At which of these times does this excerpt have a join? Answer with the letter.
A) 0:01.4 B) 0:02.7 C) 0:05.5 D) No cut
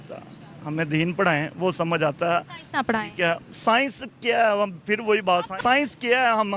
C